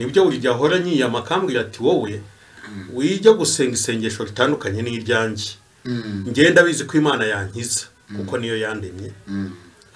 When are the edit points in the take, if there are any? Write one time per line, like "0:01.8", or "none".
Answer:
none